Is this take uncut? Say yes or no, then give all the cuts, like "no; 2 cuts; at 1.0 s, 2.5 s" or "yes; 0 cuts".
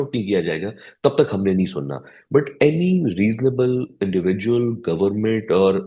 yes; 0 cuts